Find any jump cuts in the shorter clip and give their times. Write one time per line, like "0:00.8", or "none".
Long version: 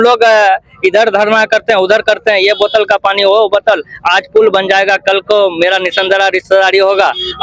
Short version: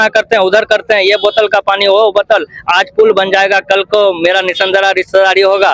none

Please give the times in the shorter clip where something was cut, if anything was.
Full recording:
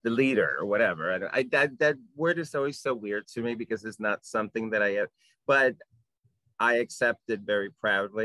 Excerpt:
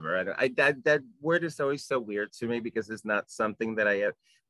none

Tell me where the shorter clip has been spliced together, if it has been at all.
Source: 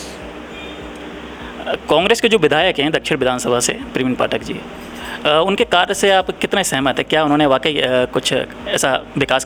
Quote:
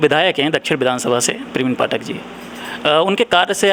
none

